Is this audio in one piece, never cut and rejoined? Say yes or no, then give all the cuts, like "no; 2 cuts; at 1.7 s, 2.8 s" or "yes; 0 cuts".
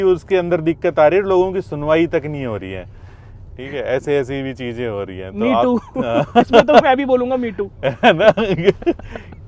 yes; 0 cuts